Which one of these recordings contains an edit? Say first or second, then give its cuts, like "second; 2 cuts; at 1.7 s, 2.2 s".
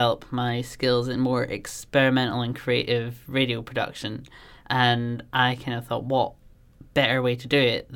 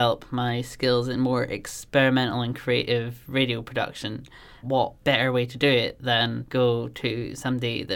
second; 2 cuts; at 4.5 s, 6.4 s